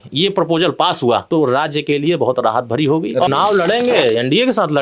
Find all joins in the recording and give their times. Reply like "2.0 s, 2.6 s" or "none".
1.2 s, 3.3 s